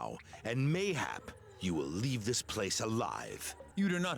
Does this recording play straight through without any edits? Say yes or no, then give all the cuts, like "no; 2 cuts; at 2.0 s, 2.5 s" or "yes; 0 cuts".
yes; 0 cuts